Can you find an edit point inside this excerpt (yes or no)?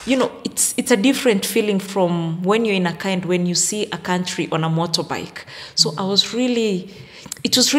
no